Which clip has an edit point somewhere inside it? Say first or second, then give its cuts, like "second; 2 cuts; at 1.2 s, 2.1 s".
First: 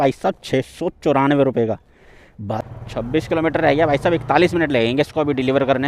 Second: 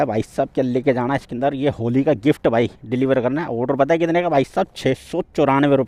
first; 1 cut; at 2.6 s